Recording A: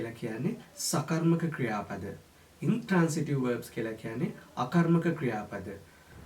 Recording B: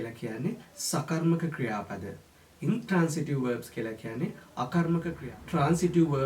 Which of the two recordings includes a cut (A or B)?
B